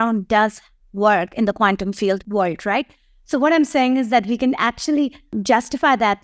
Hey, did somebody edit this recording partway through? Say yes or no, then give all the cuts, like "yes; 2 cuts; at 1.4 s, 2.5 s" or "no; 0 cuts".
yes; 2 cuts; at 2.2 s, 5.3 s